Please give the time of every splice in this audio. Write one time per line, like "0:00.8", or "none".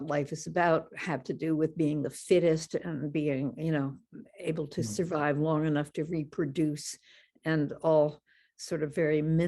none